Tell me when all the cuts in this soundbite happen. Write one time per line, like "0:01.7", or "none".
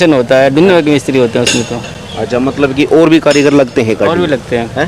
none